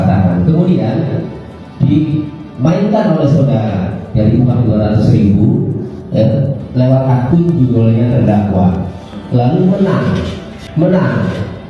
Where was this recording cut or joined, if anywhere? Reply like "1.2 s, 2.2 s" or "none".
10.5 s